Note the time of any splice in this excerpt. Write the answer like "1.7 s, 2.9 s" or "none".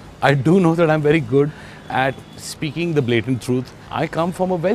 3.8 s